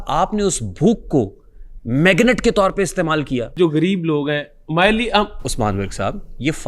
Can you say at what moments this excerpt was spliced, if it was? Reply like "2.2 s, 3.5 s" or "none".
3.5 s